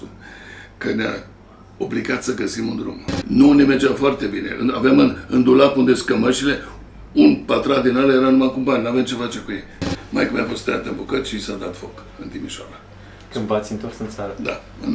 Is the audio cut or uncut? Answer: cut